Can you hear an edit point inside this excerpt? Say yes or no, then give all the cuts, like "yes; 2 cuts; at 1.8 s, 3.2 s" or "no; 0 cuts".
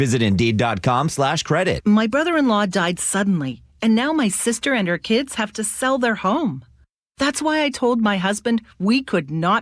yes; 1 cut; at 1.8 s